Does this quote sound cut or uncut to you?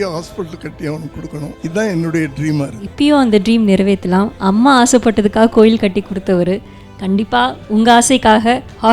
cut